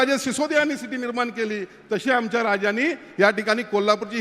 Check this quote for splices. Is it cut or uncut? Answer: uncut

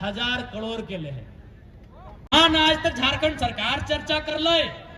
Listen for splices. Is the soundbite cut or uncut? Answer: cut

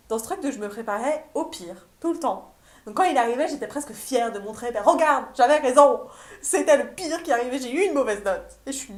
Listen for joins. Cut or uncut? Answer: uncut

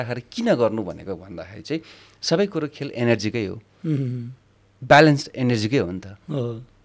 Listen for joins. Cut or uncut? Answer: uncut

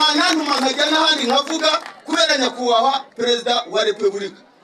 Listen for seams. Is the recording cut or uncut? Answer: uncut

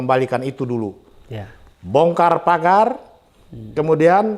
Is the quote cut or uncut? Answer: uncut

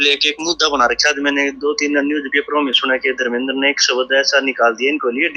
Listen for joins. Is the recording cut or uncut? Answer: uncut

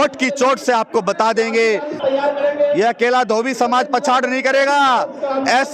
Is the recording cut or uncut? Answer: cut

